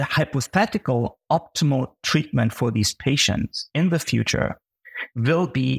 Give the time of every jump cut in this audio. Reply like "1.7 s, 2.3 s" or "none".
none